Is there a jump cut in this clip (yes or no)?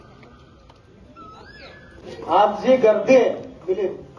yes